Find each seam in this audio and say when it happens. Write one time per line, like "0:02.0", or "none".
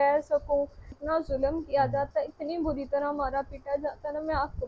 0:01.0